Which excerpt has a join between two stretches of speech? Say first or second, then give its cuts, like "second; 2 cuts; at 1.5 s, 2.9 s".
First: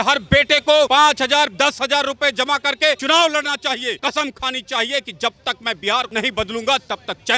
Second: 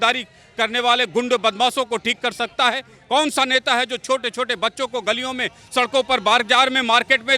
first; 4 cuts; at 0.9 s, 3.0 s, 4.0 s, 6.1 s